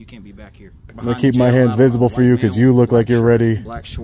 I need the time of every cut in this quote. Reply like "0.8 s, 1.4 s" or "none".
0.9 s